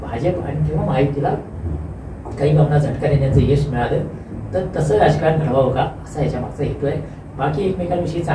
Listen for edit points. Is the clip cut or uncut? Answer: uncut